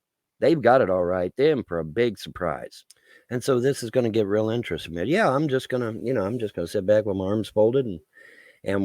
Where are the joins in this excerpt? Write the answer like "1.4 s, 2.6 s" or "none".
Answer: 3.3 s